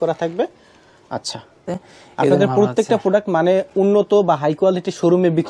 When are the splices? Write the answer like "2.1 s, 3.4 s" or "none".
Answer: 1.7 s